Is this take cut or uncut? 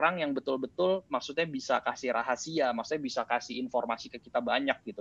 uncut